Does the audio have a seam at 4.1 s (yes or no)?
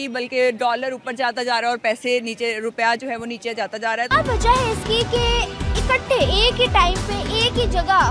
yes